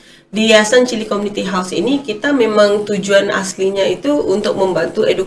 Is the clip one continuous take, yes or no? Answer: yes